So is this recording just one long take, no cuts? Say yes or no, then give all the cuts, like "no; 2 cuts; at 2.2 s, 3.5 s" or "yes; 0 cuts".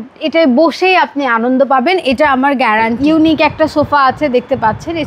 no; 1 cut; at 2.9 s